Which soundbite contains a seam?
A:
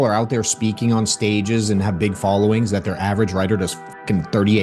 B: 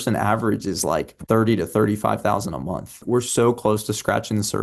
B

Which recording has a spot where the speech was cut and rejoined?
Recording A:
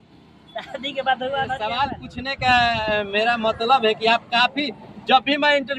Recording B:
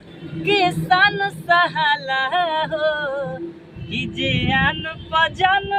A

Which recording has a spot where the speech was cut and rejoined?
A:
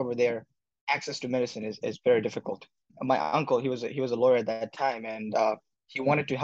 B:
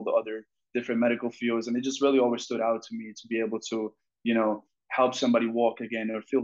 A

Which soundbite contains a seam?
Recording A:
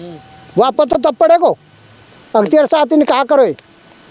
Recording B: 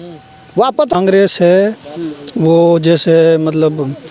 B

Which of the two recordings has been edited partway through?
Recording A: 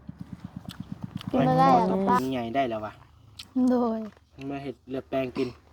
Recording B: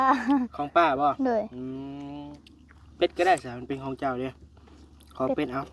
A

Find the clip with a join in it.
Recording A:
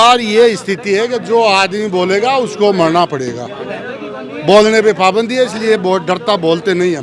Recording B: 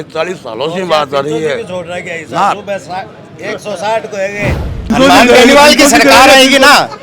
B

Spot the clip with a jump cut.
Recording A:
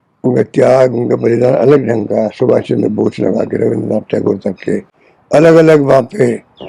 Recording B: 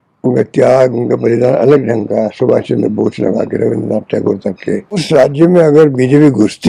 B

